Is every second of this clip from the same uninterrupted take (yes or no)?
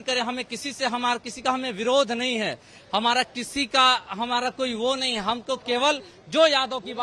yes